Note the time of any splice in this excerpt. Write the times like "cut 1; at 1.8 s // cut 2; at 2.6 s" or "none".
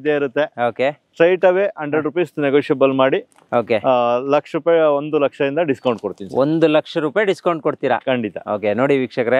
none